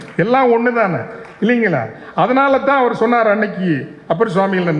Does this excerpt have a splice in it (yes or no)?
no